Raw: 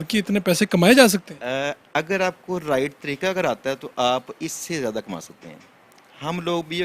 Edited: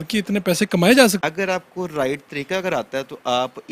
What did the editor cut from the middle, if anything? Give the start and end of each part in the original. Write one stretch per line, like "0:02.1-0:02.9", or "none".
0:01.2-0:01.9